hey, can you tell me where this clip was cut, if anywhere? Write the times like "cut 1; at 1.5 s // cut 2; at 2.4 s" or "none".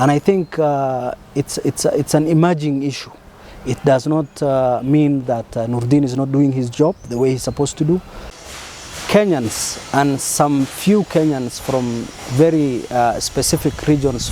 cut 1; at 8.3 s